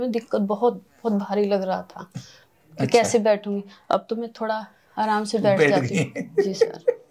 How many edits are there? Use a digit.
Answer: 0